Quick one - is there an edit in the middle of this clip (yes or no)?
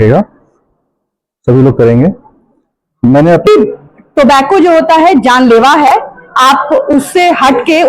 yes